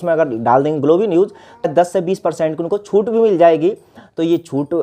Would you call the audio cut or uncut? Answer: cut